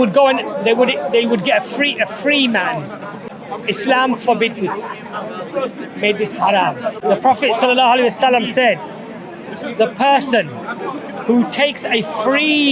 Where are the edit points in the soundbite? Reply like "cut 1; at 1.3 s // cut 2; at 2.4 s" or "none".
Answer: cut 1; at 3.3 s // cut 2; at 7.0 s